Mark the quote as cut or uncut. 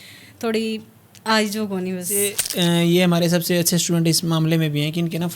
cut